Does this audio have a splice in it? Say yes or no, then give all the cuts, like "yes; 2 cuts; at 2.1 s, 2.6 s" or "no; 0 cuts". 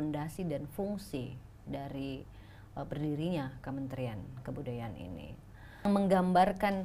yes; 1 cut; at 5.9 s